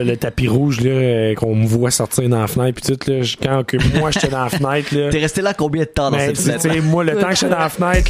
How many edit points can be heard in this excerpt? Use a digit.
0